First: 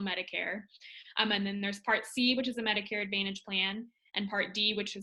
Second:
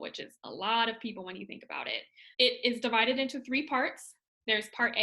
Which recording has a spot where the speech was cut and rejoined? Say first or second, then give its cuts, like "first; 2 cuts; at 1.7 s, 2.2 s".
second; 1 cut; at 2.2 s